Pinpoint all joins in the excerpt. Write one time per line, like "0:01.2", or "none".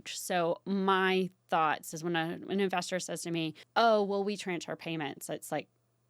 0:03.6